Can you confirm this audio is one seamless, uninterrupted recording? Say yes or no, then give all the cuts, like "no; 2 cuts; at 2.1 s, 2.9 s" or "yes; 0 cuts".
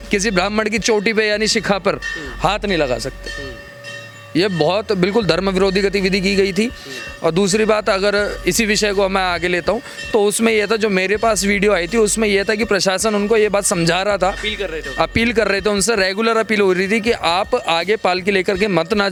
yes; 0 cuts